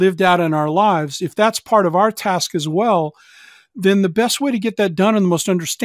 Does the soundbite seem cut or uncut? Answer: uncut